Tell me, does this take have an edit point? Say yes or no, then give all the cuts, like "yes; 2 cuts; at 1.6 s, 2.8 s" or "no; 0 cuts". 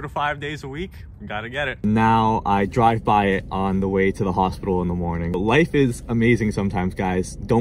yes; 2 cuts; at 1.8 s, 5.4 s